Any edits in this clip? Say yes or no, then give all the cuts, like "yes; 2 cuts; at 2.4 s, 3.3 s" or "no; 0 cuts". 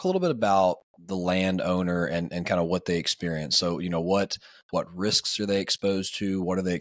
no; 0 cuts